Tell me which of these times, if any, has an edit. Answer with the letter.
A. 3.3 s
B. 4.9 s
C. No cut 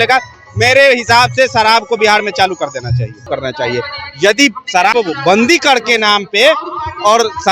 A